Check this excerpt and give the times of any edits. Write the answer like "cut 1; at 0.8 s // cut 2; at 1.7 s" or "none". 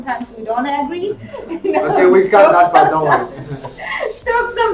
cut 1; at 1.3 s